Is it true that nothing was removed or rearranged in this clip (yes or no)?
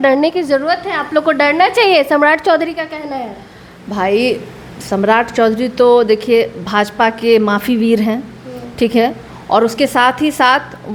yes